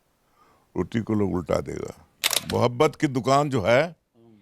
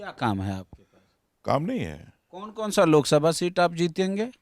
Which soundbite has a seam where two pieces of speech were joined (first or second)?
first